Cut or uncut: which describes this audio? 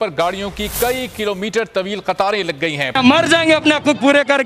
cut